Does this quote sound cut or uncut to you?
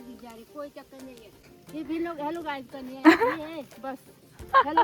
cut